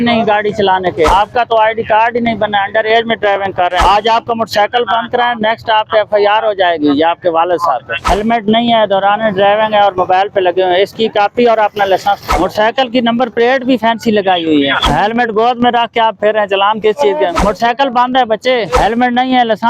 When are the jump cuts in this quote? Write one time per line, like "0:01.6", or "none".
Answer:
0:01.1
0:03.8
0:07.9
0:12.3
0:14.8
0:17.4
0:18.8